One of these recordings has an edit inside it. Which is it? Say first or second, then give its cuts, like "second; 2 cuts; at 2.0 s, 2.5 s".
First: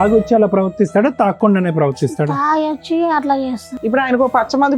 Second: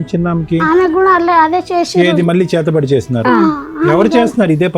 first; 1 cut; at 3.7 s